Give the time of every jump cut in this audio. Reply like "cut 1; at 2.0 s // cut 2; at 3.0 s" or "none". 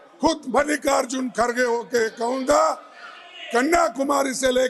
none